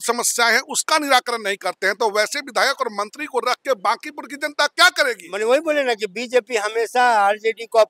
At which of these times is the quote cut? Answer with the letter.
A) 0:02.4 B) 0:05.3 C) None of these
B